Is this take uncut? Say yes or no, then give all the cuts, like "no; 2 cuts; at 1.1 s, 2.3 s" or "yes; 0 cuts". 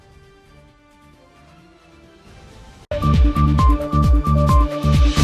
no; 1 cut; at 2.8 s